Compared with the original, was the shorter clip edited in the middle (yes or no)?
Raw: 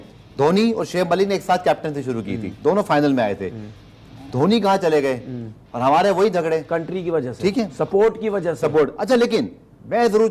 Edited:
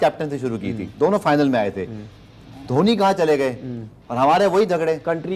no